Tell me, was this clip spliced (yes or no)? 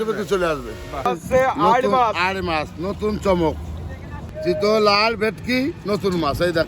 yes